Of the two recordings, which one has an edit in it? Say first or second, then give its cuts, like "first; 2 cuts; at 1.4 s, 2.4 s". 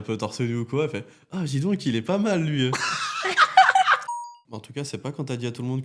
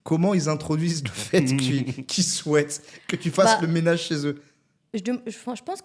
first; 1 cut; at 4.0 s